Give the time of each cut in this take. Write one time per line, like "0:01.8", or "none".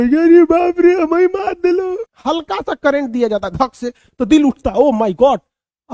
0:02.1